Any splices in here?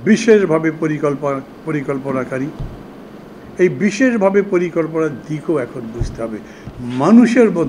no; 0 cuts

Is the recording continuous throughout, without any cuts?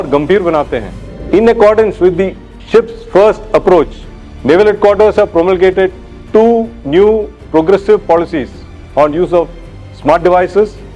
no; 1 cut; at 1.1 s

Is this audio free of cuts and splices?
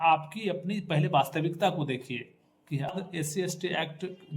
no; 1 cut; at 2.9 s

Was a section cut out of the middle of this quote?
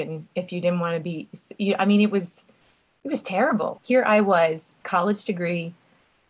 yes; 1 cut; at 3.8 s

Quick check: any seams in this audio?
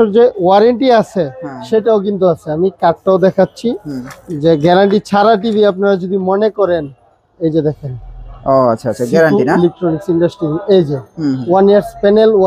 no; 0 cuts

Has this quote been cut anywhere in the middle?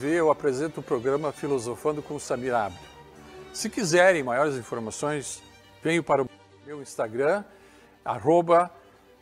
no; 0 cuts

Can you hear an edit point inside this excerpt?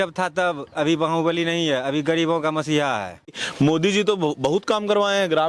yes; 1 cut; at 3.4 s

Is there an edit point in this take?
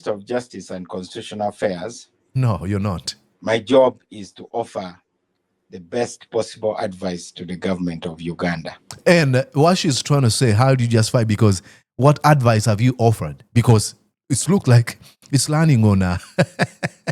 no; 0 cuts

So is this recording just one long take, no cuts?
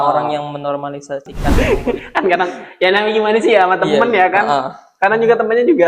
no; 1 cut; at 1.4 s

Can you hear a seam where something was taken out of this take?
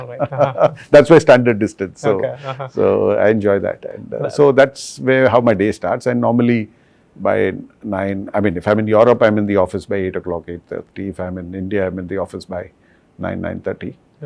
no; 0 cuts

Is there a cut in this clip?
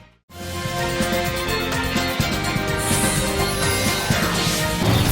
no; 0 cuts

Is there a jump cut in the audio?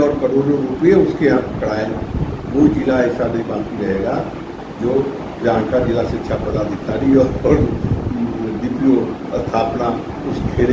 no; 0 cuts

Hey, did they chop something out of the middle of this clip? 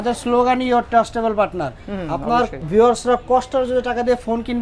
no; 0 cuts

